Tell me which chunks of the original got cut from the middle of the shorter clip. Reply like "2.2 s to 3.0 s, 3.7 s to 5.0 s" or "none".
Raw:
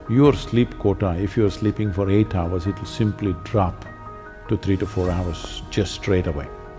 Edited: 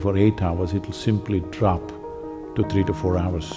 none